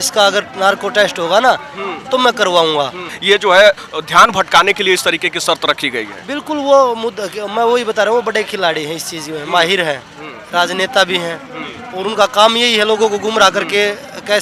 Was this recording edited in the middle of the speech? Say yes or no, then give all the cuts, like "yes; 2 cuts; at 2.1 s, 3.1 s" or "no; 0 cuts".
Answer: yes; 1 cut; at 3.1 s